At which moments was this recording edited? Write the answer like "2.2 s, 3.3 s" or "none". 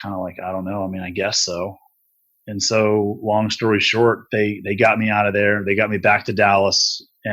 none

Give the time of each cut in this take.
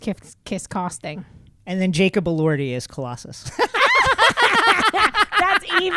none

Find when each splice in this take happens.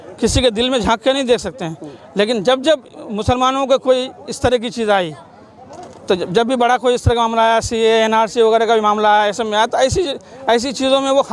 none

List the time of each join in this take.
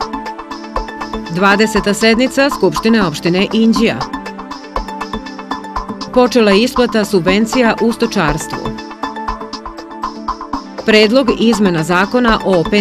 none

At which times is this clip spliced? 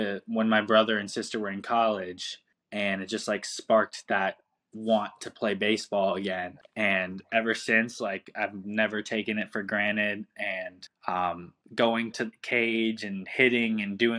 none

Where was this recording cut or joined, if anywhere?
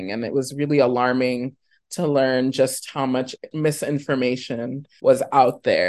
3.5 s, 4.8 s

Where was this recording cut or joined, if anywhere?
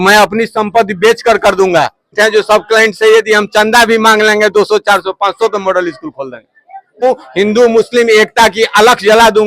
2.1 s, 7.0 s

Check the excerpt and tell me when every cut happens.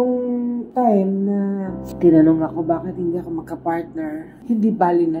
1.8 s, 4.3 s

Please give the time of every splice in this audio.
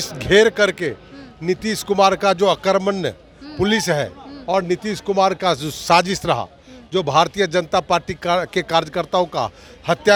none

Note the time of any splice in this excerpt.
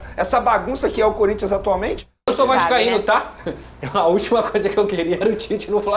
2.3 s

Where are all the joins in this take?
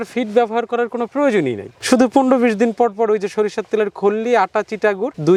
none

